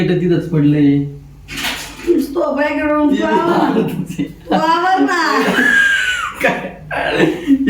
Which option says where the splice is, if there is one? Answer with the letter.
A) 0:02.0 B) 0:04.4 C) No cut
C